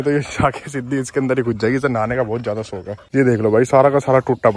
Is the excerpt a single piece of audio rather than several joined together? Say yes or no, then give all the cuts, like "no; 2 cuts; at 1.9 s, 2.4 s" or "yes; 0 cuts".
no; 1 cut; at 2.9 s